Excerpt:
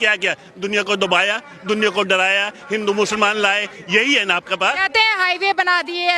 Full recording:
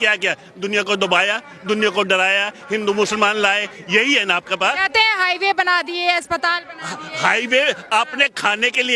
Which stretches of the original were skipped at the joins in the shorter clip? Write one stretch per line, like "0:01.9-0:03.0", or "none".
none